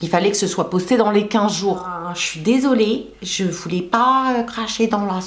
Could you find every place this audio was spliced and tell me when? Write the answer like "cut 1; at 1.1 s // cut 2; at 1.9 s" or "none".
cut 1; at 2.0 s